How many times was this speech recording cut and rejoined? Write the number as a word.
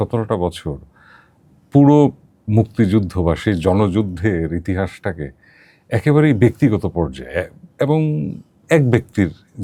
zero